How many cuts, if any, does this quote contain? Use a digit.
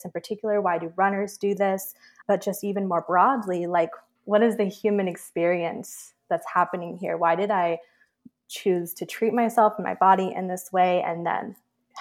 0